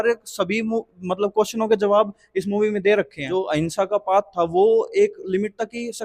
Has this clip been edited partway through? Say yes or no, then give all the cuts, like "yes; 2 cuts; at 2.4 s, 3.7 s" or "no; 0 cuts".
yes; 1 cut; at 3.2 s